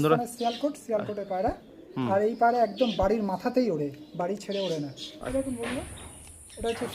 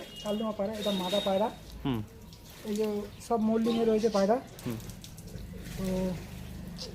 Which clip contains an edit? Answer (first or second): first